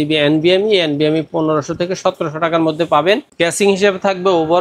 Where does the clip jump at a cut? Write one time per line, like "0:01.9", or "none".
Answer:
0:03.3